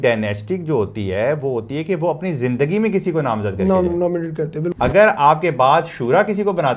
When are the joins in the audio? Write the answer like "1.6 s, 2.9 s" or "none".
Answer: 4.7 s